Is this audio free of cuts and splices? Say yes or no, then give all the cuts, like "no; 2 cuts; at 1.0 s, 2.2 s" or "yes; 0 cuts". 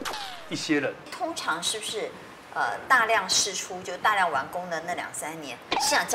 no; 1 cut; at 1.1 s